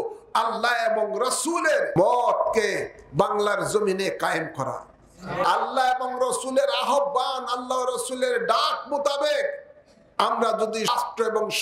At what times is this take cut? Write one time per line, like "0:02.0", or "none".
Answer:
0:01.9
0:05.4
0:10.9